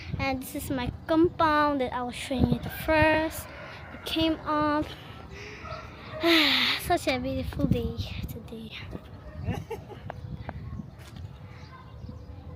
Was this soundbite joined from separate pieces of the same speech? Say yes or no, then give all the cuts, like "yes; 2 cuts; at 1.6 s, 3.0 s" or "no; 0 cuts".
no; 0 cuts